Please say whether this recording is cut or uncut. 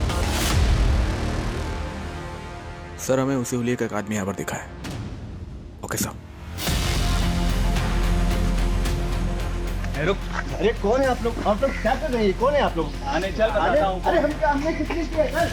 uncut